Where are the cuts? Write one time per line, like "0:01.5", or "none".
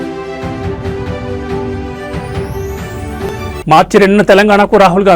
0:03.3